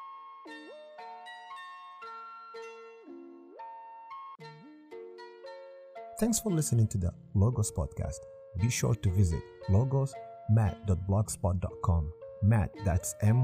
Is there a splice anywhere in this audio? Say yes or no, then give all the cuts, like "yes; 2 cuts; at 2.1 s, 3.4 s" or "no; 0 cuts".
yes; 3 cuts; at 2.6 s, 4.4 s, 6.2 s